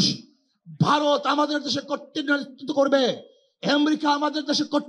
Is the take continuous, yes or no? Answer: yes